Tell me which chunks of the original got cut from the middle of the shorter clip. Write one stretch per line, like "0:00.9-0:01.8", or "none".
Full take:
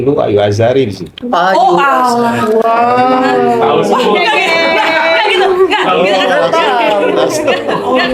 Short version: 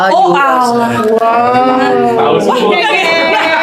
none